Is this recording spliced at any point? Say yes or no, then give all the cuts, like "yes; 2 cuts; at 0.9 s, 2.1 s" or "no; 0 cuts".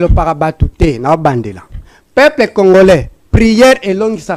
no; 0 cuts